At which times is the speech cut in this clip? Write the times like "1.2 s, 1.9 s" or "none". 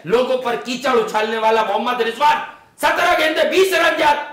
none